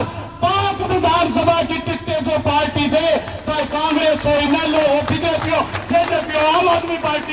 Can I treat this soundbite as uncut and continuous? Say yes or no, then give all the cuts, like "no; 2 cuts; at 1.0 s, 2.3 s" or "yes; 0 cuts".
yes; 0 cuts